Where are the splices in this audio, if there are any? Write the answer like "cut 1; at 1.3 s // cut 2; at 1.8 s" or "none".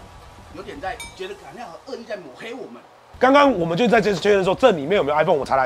cut 1; at 1.1 s // cut 2; at 3.1 s